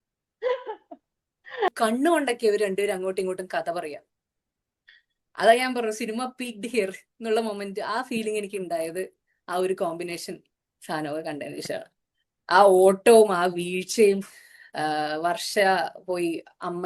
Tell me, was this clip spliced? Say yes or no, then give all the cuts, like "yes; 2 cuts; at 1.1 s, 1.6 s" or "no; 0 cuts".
yes; 1 cut; at 1.7 s